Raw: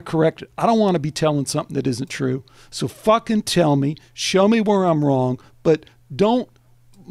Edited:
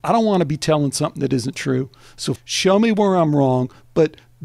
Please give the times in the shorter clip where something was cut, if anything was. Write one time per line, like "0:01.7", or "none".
0:02.4